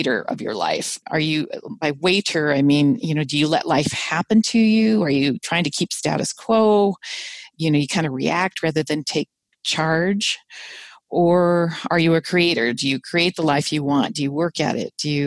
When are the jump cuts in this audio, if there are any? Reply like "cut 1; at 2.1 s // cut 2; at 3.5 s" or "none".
none